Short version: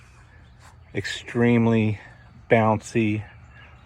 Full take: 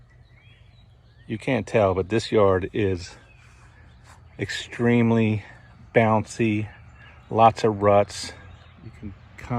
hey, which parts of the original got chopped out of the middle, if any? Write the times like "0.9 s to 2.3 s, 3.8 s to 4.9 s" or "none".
none